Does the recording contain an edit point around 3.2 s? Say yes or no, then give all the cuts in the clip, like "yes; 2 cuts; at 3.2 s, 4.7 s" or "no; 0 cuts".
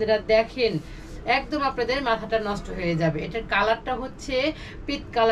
no; 0 cuts